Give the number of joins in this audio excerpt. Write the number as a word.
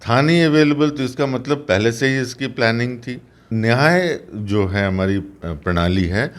one